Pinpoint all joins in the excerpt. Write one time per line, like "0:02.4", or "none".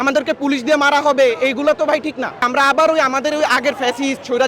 0:02.4